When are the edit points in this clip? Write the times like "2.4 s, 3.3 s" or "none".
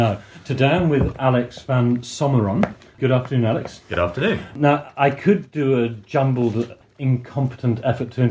3.0 s, 4.5 s, 6.8 s